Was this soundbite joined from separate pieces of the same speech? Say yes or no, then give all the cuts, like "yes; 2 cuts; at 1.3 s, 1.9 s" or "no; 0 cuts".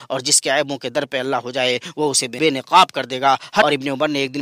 yes; 2 cuts; at 2.3 s, 3.6 s